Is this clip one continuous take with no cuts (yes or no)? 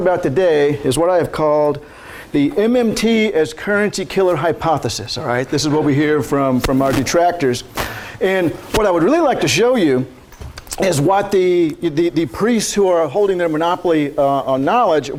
yes